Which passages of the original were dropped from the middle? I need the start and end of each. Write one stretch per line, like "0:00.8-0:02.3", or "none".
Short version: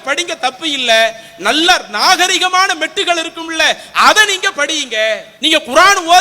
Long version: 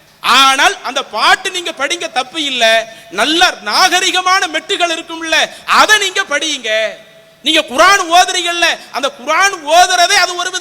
0:07.0-0:07.3